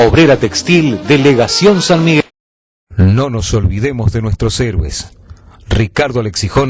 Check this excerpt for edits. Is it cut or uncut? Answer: cut